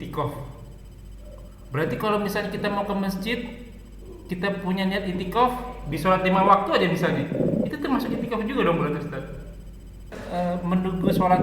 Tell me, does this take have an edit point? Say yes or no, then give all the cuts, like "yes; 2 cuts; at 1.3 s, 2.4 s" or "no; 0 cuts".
yes; 1 cut; at 10.2 s